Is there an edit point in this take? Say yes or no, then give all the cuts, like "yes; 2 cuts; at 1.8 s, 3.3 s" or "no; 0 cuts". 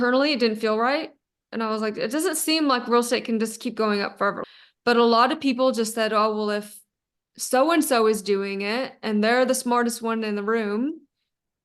yes; 1 cut; at 4.4 s